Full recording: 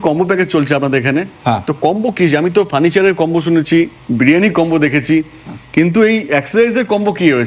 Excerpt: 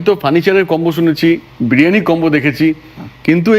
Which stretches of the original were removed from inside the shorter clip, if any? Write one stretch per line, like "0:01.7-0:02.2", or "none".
none